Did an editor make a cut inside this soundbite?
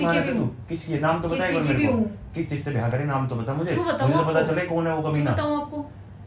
no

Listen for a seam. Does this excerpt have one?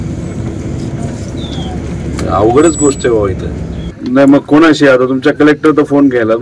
yes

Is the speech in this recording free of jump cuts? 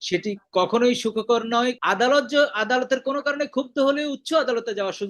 no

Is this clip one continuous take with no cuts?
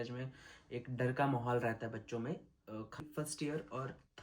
no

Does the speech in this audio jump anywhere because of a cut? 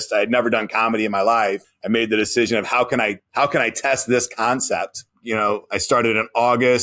yes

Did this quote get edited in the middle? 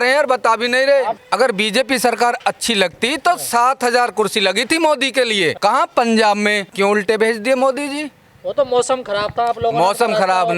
yes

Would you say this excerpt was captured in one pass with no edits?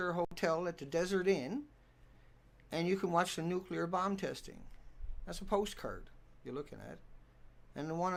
yes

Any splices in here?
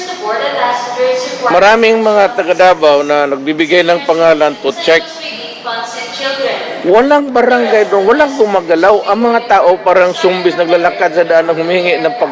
no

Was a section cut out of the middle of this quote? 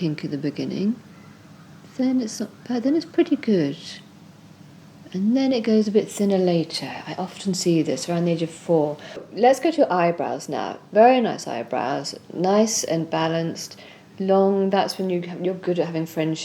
yes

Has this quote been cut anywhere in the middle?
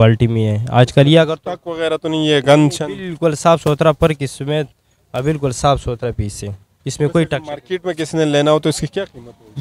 no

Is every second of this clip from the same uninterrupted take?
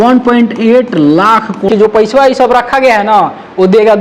no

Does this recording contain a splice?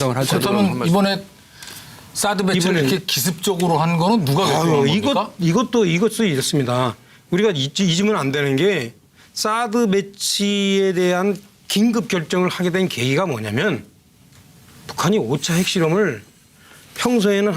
yes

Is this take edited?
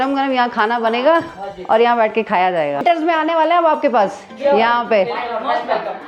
yes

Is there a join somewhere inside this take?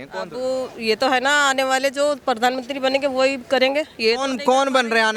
no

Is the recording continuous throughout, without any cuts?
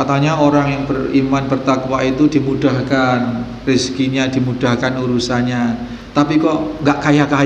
yes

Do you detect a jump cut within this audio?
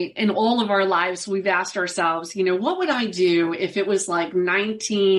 no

